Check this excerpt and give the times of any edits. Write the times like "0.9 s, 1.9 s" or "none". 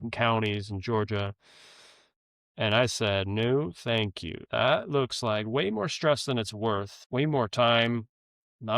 7.0 s